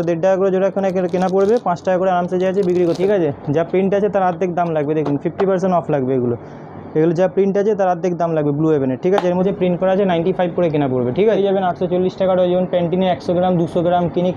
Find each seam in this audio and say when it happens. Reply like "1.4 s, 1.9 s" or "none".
3.0 s, 9.4 s, 11.4 s